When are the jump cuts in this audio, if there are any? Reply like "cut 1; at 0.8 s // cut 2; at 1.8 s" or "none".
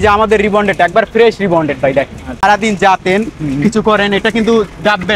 cut 1; at 2.3 s